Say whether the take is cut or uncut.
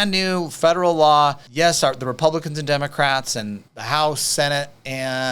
cut